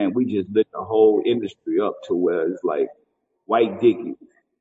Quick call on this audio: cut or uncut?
uncut